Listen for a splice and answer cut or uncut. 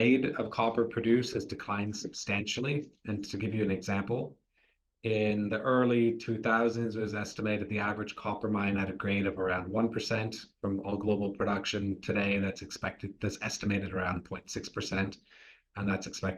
uncut